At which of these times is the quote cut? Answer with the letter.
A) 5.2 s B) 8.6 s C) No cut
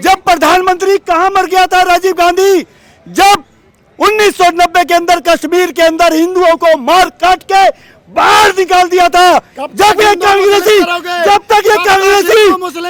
C